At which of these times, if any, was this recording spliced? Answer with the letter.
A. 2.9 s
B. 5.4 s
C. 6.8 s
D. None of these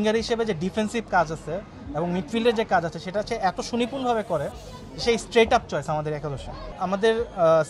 C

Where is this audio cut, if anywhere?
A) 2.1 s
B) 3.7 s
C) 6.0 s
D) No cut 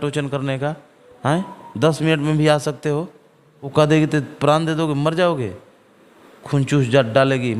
B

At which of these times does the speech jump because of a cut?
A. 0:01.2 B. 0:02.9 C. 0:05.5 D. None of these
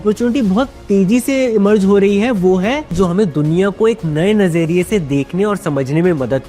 B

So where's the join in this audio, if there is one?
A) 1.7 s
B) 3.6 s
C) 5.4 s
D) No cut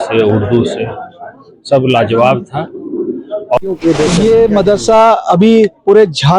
B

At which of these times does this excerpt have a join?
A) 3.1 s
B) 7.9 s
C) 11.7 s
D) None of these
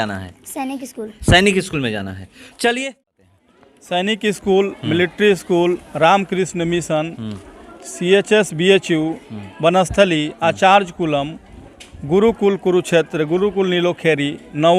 A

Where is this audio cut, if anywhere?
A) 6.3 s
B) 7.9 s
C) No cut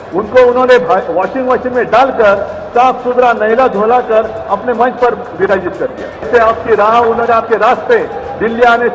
A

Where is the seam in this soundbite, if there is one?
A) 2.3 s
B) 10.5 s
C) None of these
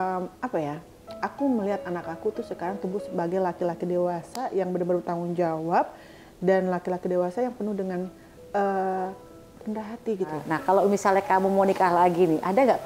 B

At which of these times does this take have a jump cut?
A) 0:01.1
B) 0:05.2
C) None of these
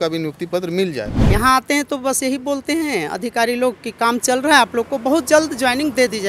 A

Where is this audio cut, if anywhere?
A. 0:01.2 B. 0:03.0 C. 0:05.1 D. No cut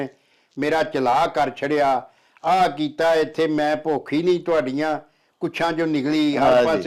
D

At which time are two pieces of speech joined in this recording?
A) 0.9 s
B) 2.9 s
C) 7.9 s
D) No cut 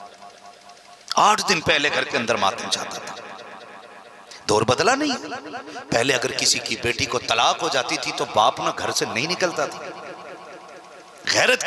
A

